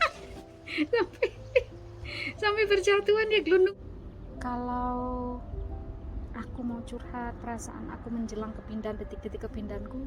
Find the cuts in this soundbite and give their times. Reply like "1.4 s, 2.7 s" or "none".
3.7 s